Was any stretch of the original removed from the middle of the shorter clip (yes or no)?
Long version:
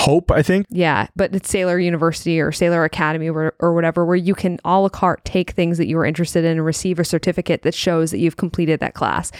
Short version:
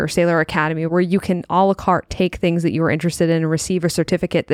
yes